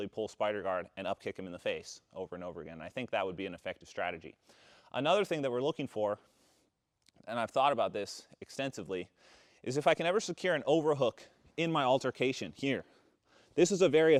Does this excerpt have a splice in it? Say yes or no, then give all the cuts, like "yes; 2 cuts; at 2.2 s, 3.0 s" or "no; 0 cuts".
no; 0 cuts